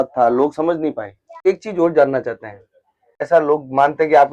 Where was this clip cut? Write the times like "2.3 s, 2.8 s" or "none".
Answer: 1.5 s, 3.3 s